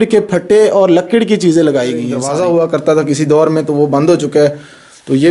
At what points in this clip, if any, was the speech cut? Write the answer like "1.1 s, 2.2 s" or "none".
2.2 s